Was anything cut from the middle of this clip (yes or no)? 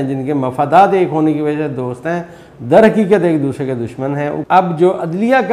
yes